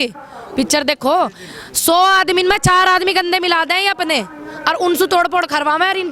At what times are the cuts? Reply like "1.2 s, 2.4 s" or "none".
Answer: none